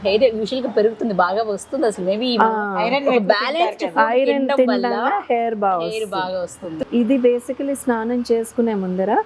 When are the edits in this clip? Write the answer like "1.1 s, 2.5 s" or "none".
6.8 s